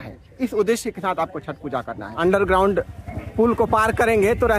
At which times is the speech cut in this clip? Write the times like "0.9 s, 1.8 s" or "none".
2.1 s